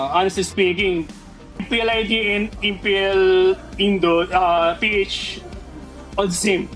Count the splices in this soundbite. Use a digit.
1